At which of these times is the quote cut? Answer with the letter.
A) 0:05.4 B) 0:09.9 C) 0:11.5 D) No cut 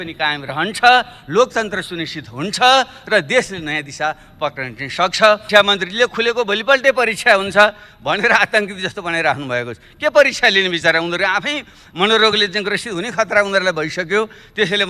A